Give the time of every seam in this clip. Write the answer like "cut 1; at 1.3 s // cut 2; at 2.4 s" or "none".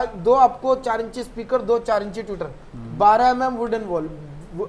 none